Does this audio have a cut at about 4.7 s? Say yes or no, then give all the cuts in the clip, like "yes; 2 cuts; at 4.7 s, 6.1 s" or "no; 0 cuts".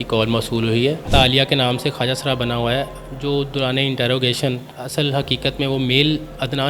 yes; 2 cuts; at 1.1 s, 4.7 s